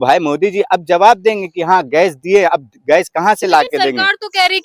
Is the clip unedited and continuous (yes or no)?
yes